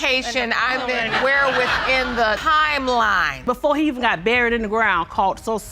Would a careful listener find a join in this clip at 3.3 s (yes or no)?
yes